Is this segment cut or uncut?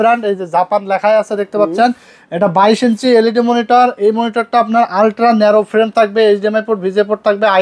uncut